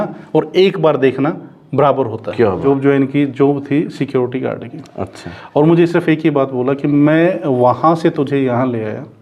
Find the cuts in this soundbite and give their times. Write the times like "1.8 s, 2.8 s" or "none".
2.6 s